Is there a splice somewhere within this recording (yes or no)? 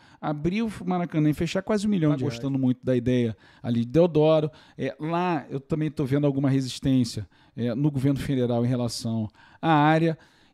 yes